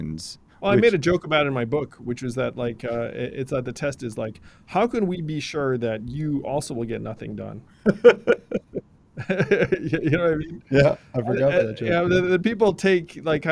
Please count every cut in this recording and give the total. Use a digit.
0